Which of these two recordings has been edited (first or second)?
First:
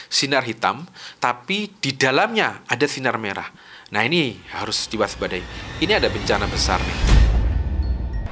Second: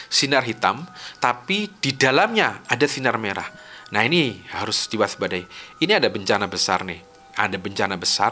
first